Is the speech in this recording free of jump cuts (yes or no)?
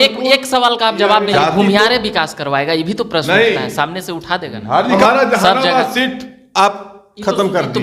no